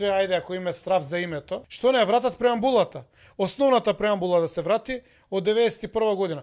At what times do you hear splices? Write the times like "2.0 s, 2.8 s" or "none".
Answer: 1.6 s